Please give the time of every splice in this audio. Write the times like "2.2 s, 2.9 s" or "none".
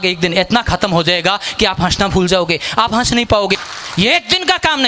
3.7 s